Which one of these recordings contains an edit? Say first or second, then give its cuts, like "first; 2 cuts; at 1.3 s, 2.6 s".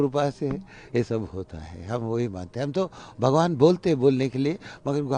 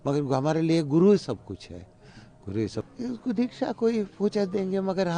second; 1 cut; at 2.8 s